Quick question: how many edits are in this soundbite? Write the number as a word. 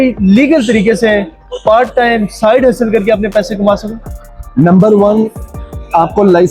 zero